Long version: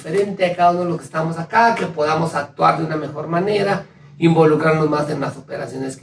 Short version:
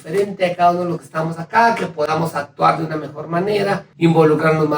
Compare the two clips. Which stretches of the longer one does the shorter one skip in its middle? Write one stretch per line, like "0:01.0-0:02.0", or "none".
0:03.9-0:04.1